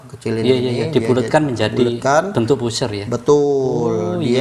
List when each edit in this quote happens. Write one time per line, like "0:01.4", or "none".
none